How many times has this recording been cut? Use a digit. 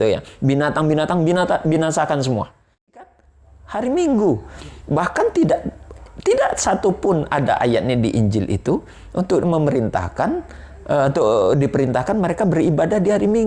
1